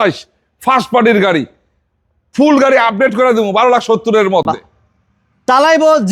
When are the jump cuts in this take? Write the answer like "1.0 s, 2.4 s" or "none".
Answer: none

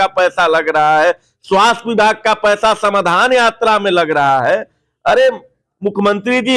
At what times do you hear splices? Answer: none

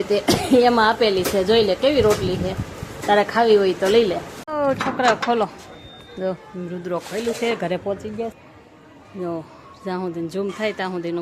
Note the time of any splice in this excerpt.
4.4 s, 8.3 s

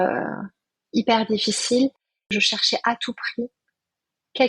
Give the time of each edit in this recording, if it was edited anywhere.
2.3 s

